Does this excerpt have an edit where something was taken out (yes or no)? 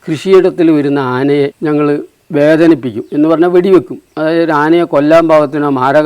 yes